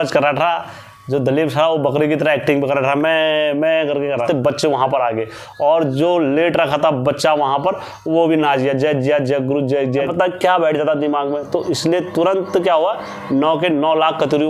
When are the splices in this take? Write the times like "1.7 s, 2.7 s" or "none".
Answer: 4.2 s, 10.1 s